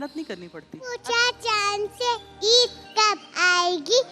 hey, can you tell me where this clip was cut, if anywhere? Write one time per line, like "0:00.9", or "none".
0:01.0

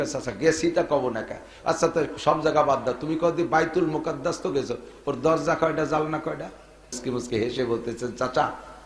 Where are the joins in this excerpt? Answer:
0:07.0

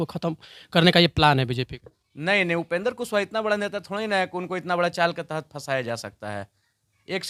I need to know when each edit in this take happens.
none

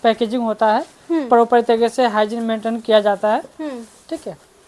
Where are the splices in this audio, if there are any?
none

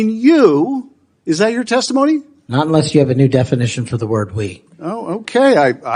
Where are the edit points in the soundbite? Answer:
none

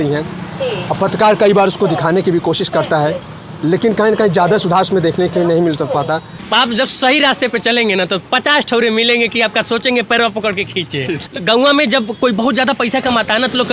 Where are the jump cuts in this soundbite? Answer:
0:06.4
0:11.3

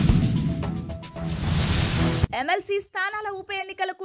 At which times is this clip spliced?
none

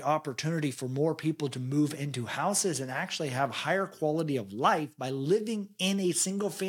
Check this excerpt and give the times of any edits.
none

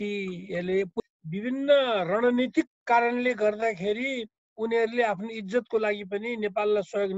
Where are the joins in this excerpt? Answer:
0:01.0

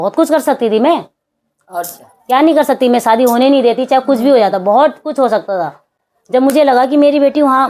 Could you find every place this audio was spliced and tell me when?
none

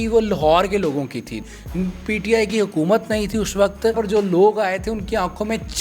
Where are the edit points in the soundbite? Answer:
0:01.3
0:04.0

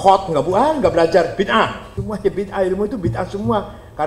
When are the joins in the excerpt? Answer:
0:01.9

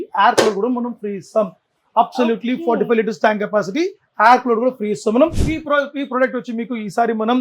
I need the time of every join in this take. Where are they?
0:05.4

